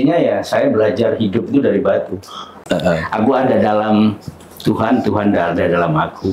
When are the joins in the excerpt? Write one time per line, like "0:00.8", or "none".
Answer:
0:02.5